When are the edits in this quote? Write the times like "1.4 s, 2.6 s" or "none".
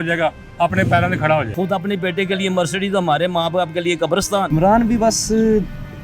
1.5 s, 4.5 s